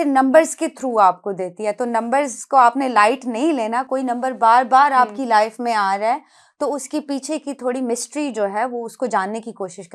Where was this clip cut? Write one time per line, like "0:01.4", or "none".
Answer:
none